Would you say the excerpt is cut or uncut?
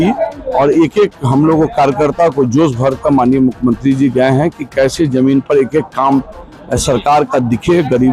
uncut